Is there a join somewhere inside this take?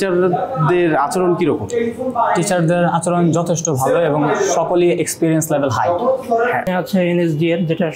yes; 1 cut; at 6.7 s

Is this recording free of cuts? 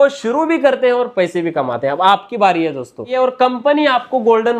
no; 1 cut; at 3.1 s

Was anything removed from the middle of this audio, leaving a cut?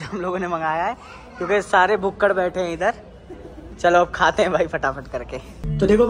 no; 0 cuts

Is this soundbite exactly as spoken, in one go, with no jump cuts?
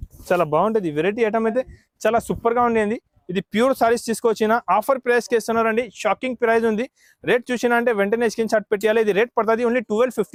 yes; 0 cuts

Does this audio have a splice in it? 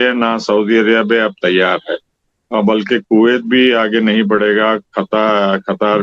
no; 0 cuts

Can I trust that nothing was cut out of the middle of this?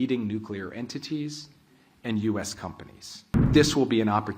no; 1 cut; at 3.5 s

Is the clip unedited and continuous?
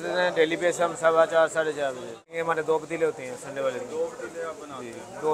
no; 1 cut; at 2.3 s

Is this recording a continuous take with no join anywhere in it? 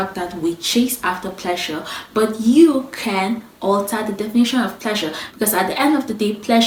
yes; 0 cuts

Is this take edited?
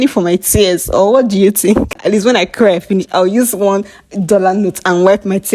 yes; 1 cut; at 2.0 s

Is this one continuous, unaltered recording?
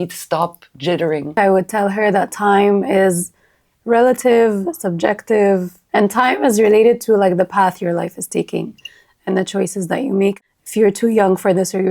no; 3 cuts; at 1.3 s, 5.8 s, 10.4 s

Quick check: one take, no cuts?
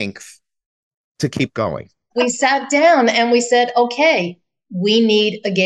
no; 1 cut; at 2.1 s

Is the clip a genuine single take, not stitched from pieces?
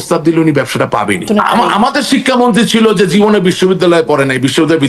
no; 1 cut; at 1.3 s

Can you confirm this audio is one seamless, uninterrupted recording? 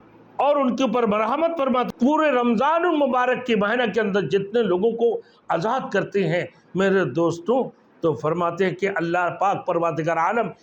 no; 1 cut; at 1.9 s

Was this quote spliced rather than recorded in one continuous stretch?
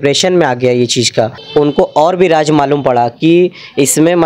yes; 1 cut; at 1.4 s

